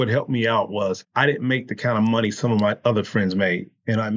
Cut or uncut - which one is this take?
cut